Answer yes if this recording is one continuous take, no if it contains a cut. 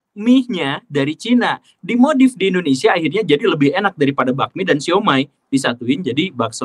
yes